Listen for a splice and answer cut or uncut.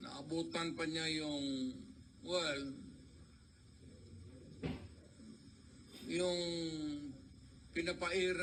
uncut